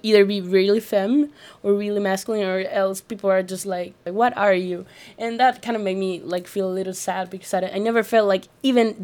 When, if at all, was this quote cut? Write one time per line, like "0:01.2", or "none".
0:04.0